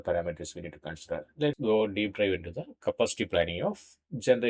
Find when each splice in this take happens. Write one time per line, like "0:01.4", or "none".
0:01.6